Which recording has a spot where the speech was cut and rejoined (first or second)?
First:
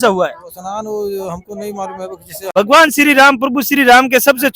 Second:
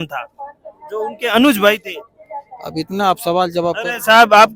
first